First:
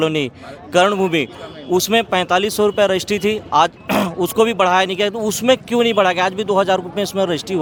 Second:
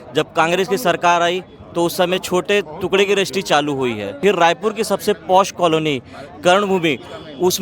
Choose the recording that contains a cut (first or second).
second